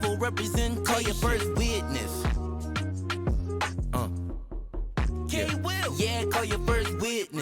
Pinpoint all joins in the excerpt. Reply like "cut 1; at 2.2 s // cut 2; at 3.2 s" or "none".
none